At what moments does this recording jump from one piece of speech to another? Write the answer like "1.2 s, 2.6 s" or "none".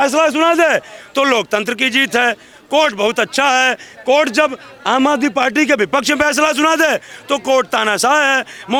none